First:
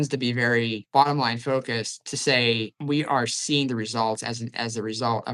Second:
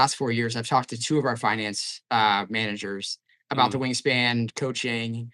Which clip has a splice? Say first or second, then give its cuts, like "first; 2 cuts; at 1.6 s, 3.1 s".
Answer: first; 2 cuts; at 0.9 s, 2.7 s